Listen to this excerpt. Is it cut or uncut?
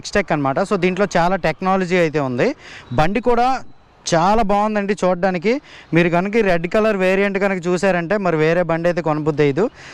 uncut